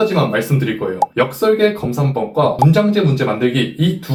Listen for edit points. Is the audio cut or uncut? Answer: uncut